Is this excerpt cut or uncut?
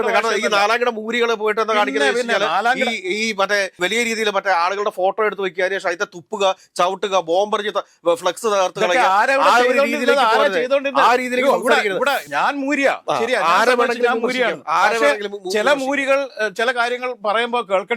cut